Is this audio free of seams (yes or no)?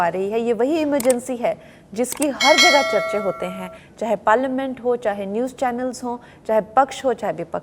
yes